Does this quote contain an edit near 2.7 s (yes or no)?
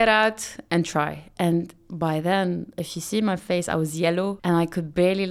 no